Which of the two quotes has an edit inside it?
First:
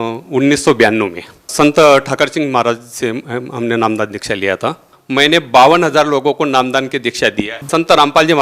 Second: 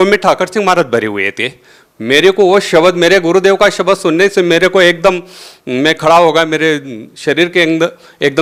first; 3 cuts; at 1.5 s, 4.9 s, 7.7 s

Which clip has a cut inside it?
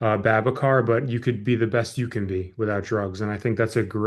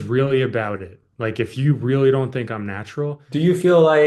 second; 1 cut; at 3.2 s

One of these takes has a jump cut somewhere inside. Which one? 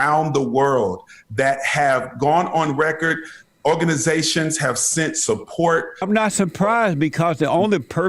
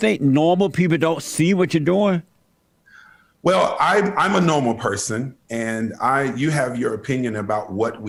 first; 1 cut; at 6.0 s

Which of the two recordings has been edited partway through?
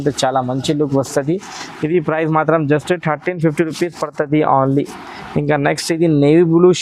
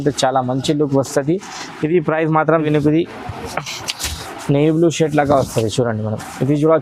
second; 1 cut; at 2.6 s

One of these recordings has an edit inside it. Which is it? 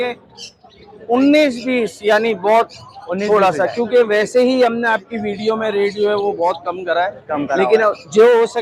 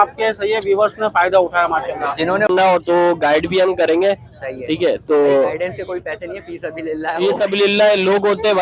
second; 1 cut; at 2.5 s

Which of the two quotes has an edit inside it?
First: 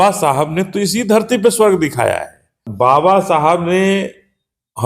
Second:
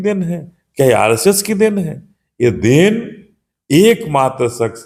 first; 1 cut; at 2.6 s

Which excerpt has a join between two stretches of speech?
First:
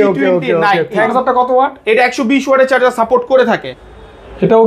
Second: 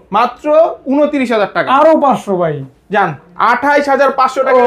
first; 2 cuts; at 1.0 s, 3.7 s

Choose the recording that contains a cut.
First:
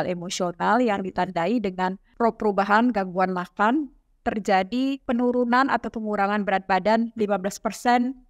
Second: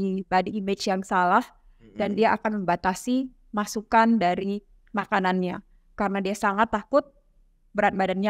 first; 2 cuts; at 2.0 s, 5.0 s

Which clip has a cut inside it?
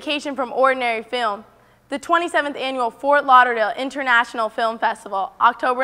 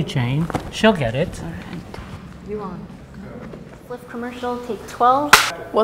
second; 2 cuts; at 1.9 s, 3.7 s

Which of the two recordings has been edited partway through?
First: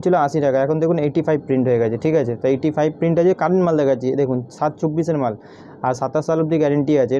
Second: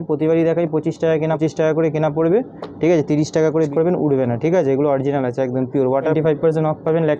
second; 3 cuts; at 1.4 s, 3.7 s, 6.1 s

